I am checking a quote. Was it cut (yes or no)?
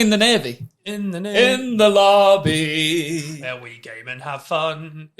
yes